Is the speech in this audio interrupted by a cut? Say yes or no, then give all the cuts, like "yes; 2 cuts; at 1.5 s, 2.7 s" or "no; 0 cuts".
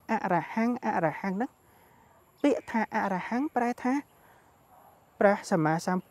no; 0 cuts